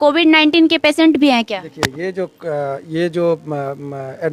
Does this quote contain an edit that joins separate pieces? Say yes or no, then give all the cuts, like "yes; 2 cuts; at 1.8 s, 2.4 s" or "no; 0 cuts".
no; 0 cuts